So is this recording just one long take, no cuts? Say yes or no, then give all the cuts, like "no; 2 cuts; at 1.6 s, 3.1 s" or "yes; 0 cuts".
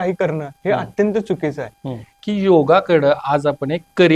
no; 1 cut; at 2.1 s